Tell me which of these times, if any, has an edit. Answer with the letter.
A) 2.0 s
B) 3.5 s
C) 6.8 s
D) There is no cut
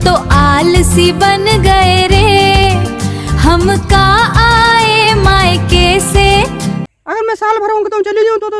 C